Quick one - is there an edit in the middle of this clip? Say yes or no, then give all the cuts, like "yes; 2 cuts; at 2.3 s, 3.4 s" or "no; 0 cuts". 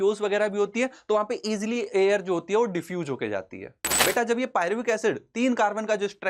yes; 1 cut; at 4.0 s